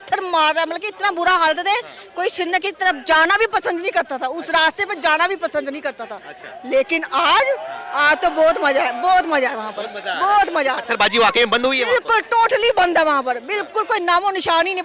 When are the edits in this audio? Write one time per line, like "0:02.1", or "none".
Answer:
none